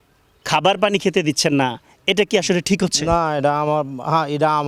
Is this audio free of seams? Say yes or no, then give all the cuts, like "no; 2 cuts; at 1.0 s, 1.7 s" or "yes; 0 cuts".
yes; 0 cuts